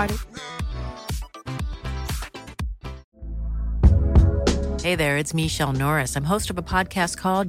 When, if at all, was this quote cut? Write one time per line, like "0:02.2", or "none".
0:03.1